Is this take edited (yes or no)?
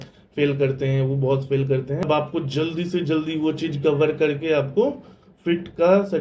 yes